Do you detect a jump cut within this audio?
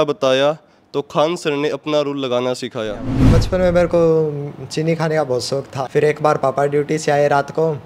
yes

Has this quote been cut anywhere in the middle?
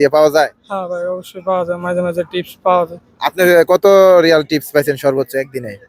no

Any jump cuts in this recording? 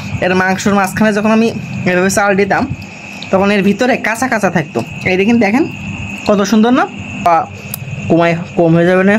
yes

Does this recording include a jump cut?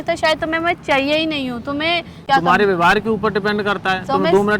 yes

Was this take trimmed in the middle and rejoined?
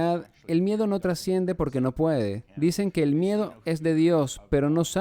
yes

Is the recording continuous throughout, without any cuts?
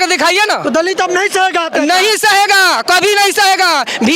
yes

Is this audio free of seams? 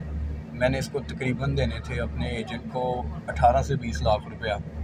yes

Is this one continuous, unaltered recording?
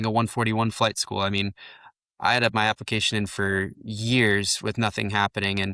yes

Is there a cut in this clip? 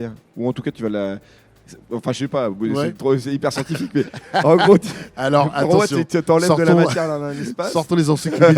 no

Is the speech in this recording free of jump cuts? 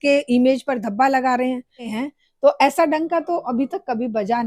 no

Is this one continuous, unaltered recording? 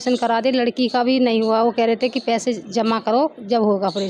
yes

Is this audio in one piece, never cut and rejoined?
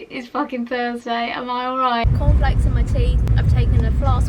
no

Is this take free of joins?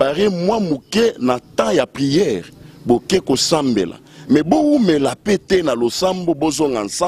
yes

